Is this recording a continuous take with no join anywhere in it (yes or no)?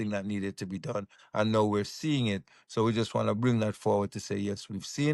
yes